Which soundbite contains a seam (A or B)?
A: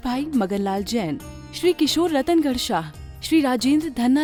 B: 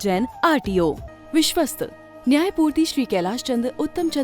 B